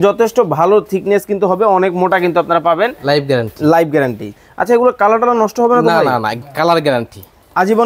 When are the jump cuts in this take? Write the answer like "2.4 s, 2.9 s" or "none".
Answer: 4.3 s